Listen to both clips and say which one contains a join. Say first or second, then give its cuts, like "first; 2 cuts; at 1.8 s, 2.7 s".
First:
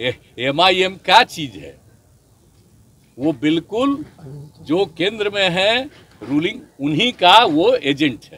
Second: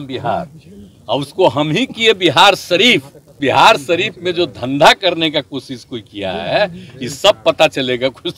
second; 1 cut; at 3.3 s